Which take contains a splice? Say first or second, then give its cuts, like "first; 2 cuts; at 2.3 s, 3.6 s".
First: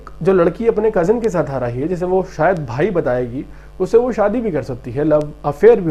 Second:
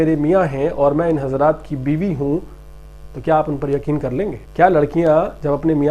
second; 1 cut; at 4.4 s